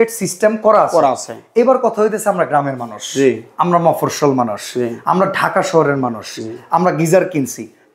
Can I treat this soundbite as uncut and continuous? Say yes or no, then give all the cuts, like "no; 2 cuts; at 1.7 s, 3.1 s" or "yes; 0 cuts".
yes; 0 cuts